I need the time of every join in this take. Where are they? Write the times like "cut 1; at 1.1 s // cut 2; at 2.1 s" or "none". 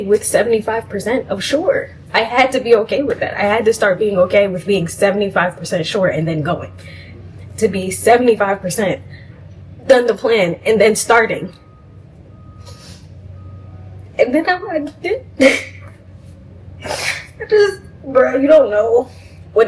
none